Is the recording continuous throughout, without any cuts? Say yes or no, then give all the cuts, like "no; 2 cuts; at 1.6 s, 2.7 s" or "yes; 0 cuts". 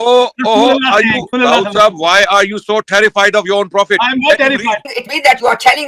no; 2 cuts; at 1.3 s, 5.0 s